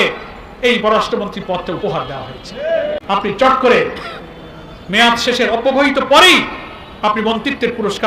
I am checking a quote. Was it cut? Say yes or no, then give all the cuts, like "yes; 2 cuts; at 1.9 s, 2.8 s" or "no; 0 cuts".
yes; 1 cut; at 3.0 s